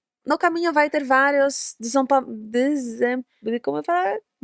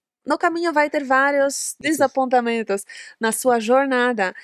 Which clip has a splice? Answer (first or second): second